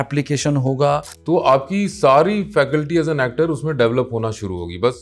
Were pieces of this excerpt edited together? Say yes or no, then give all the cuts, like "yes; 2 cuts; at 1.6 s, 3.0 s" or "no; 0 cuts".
yes; 1 cut; at 1.1 s